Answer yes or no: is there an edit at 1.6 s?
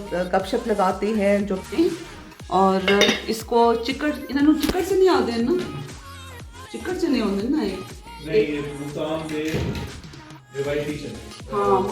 yes